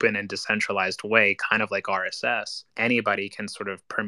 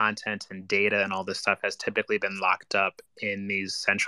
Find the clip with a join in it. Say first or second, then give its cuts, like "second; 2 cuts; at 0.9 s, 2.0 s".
first; 1 cut; at 2.6 s